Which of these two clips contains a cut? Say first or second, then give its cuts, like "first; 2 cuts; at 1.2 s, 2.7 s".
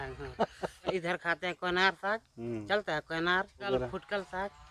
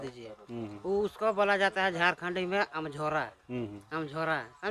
first; 2 cuts; at 0.9 s, 3.7 s